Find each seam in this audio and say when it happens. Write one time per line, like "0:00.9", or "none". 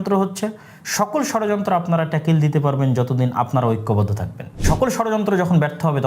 0:04.6